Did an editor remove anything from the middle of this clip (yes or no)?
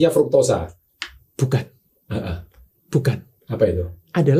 no